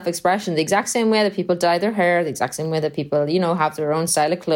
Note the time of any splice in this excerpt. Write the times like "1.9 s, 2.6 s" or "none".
none